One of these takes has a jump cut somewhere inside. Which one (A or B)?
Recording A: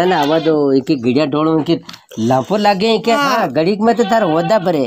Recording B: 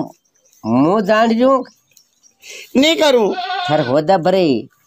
A